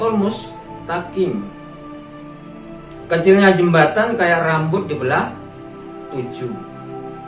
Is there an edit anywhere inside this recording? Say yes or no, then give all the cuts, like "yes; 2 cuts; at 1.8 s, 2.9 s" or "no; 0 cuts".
no; 0 cuts